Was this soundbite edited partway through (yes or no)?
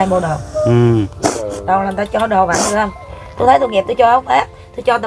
no